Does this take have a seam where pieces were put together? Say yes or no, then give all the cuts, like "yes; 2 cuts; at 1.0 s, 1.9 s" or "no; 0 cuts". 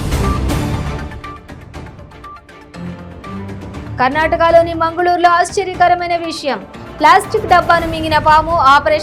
no; 0 cuts